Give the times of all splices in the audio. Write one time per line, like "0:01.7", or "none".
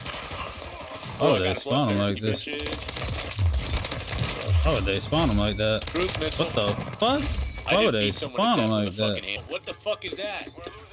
0:09.4